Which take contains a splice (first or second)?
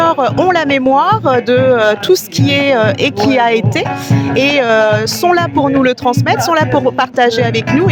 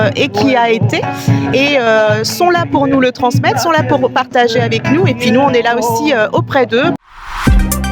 second